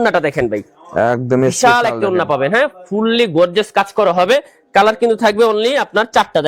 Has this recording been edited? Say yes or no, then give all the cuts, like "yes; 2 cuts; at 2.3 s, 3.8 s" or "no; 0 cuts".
no; 0 cuts